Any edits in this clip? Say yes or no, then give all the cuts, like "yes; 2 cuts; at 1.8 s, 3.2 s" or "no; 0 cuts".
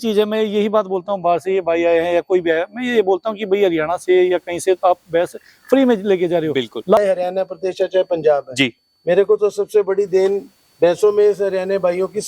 yes; 1 cut; at 7.0 s